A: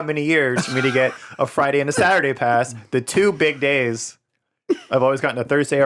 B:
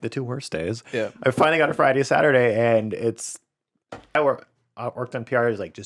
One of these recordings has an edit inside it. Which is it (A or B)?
B